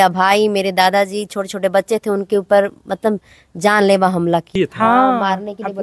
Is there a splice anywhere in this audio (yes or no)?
yes